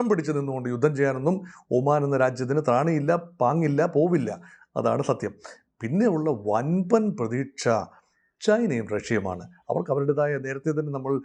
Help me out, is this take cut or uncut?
uncut